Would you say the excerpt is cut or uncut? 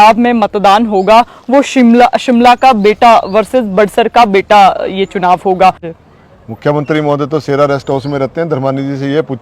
cut